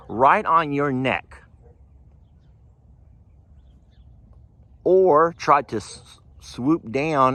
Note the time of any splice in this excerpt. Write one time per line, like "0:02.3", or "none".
none